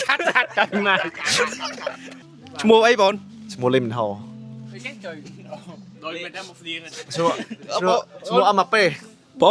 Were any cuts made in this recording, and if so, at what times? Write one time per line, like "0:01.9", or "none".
none